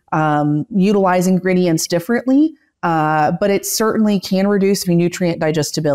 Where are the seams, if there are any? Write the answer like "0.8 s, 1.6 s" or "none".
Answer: 4.8 s